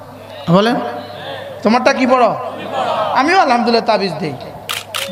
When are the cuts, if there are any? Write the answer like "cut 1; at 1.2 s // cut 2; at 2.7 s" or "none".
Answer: none